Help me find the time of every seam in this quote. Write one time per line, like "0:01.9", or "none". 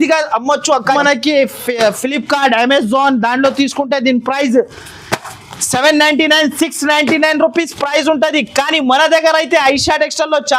0:01.0